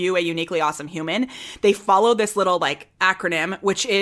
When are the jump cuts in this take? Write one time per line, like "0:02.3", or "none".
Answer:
0:02.9